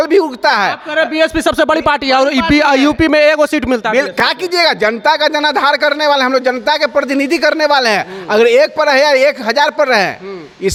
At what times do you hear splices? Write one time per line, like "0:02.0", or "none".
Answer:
none